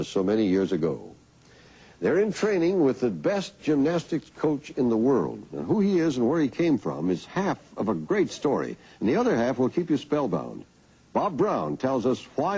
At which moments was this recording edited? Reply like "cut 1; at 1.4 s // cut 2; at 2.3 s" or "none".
none